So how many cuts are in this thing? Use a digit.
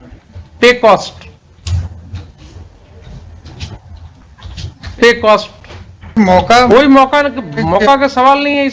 1